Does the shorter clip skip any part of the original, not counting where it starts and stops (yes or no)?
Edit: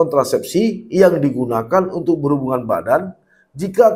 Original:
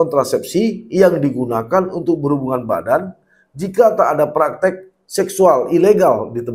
no